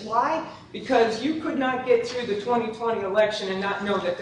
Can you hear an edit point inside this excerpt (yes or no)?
no